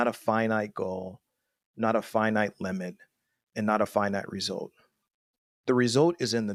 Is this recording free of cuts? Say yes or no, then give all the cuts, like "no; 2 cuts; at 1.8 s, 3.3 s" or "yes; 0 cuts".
yes; 0 cuts